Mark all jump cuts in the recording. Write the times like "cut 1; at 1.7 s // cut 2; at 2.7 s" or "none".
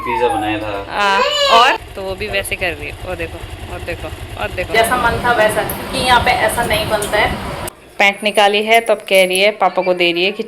cut 1; at 1.8 s // cut 2; at 4.7 s // cut 3; at 7.7 s